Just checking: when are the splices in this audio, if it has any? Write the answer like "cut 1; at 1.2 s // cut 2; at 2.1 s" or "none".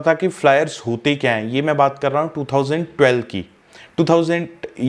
none